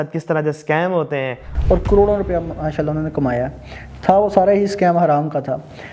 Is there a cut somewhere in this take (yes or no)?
yes